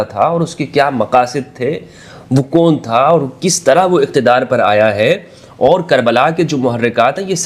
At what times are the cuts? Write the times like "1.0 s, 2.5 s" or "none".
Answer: none